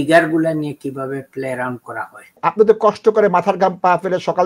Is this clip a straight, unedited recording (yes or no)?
no